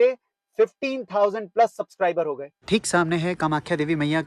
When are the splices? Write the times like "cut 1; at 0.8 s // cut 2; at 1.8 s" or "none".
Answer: cut 1; at 2.6 s